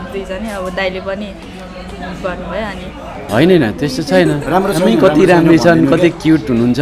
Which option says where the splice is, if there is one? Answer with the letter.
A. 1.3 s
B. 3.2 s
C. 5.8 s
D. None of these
B